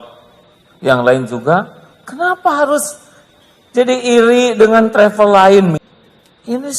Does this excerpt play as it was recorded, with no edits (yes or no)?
no